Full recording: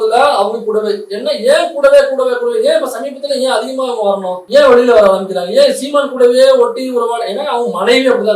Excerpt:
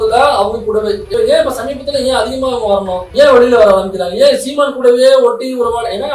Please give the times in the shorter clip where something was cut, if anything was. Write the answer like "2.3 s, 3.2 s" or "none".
1.1 s